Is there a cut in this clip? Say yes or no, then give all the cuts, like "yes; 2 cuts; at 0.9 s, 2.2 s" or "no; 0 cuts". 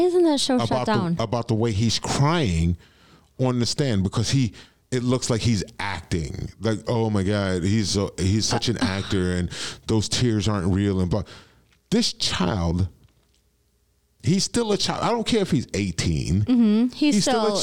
no; 0 cuts